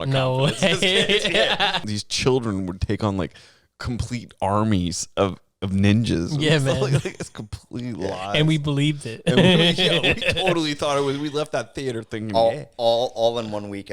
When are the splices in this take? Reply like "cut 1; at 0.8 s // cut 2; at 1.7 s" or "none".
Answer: cut 1; at 1.9 s